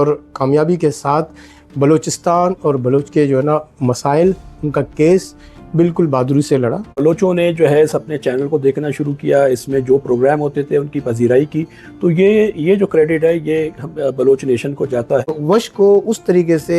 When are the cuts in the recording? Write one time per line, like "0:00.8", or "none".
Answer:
0:07.0
0:15.3